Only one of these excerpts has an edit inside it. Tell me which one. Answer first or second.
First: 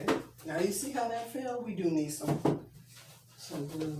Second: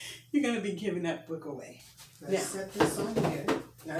second